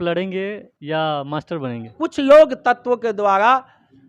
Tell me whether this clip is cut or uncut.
cut